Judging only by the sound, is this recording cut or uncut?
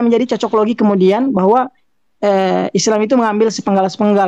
uncut